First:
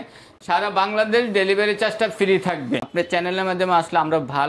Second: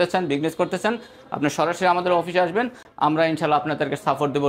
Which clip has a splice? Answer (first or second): first